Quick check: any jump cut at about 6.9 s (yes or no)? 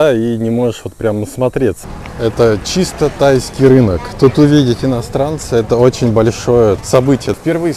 yes